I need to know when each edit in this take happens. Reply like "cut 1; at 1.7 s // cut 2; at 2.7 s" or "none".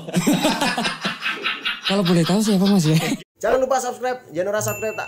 cut 1; at 3.1 s